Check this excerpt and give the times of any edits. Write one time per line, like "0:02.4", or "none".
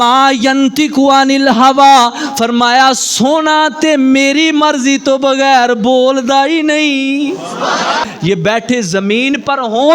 0:08.1